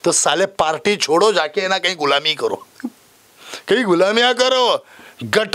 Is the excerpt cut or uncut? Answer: uncut